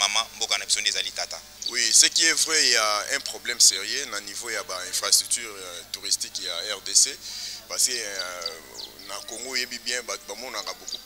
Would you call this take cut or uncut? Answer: cut